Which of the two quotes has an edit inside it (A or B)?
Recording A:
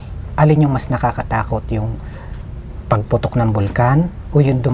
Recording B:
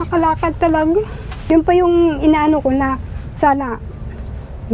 B